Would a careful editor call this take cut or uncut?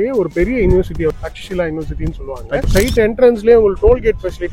cut